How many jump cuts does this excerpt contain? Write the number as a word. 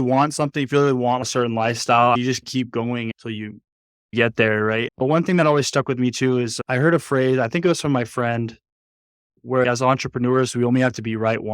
three